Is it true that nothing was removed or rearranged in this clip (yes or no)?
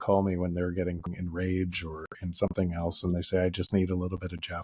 no